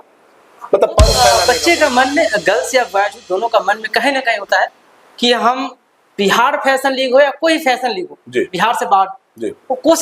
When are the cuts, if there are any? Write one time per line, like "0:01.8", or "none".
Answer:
0:01.1